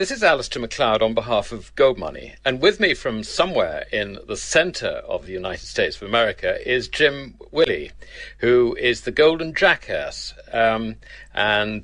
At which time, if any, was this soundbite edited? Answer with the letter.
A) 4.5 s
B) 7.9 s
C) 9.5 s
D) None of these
A